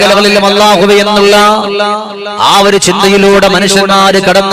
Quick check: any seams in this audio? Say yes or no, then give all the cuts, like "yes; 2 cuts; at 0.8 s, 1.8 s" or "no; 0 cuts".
no; 0 cuts